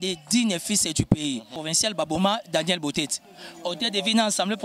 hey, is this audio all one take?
no; 1 cut; at 1.6 s

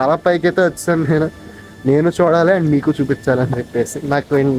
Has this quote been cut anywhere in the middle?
no; 0 cuts

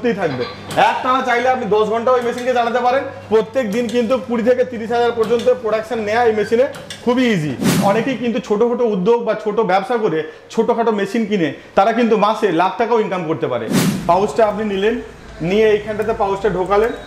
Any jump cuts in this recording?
yes; 2 cuts; at 7.8 s, 13.8 s

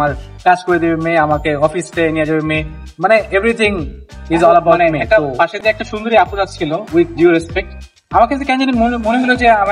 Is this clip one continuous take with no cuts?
no; 1 cut; at 4.8 s

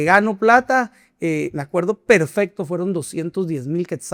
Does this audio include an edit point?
no; 0 cuts

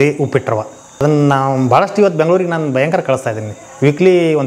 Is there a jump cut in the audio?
yes; 1 cut; at 1.0 s

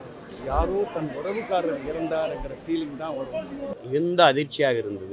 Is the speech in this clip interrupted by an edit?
yes; 1 cut; at 3.7 s

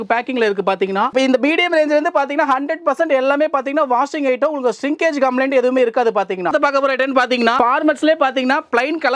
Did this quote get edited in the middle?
yes; 2 cuts; at 1.1 s, 6.5 s

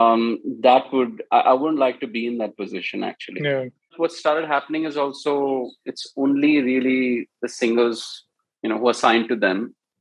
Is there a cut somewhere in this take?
yes; 1 cut; at 3.9 s

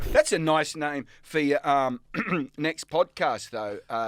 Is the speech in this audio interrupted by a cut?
no; 0 cuts

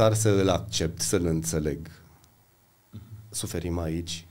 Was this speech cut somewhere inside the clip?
yes; 1 cut; at 2.1 s

